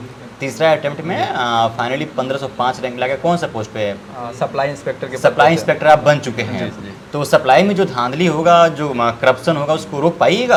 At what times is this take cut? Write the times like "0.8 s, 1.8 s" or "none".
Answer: none